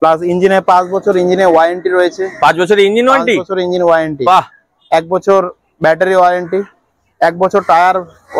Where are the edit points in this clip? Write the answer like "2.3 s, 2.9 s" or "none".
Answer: none